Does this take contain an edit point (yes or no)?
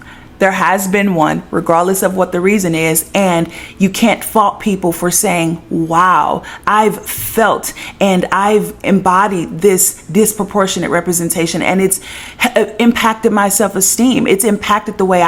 no